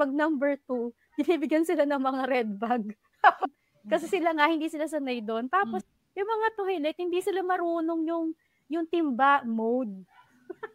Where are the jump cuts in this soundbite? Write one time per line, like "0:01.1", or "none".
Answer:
0:03.4
0:05.8